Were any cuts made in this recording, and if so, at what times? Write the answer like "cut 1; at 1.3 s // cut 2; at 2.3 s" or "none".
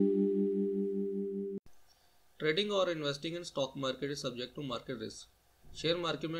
cut 1; at 1.6 s